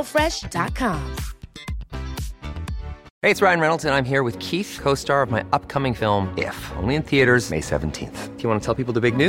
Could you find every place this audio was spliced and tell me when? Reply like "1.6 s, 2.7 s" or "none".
3.0 s